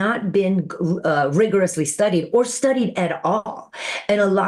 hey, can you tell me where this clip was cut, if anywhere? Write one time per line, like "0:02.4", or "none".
none